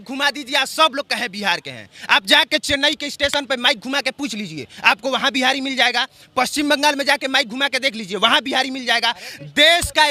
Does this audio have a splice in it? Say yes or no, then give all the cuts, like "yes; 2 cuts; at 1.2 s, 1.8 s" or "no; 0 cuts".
no; 0 cuts